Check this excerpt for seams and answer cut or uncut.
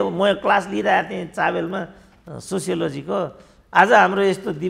uncut